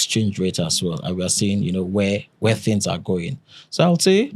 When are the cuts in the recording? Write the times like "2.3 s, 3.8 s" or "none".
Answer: none